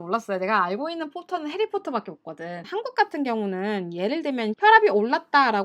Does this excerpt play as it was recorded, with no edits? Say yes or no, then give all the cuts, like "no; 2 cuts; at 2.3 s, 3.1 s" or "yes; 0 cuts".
no; 1 cut; at 2.7 s